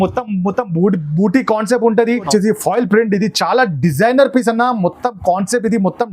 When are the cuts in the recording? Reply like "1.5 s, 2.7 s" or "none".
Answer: 2.3 s